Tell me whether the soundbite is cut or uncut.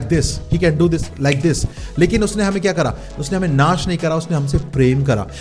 uncut